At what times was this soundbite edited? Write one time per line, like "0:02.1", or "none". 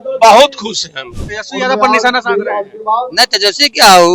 0:01.1

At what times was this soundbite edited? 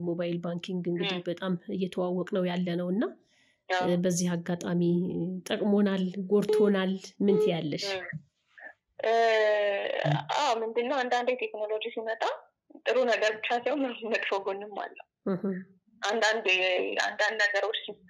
none

